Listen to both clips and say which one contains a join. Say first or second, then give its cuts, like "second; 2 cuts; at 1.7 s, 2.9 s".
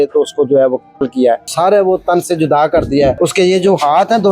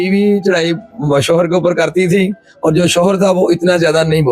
first; 2 cuts; at 1.4 s, 3.1 s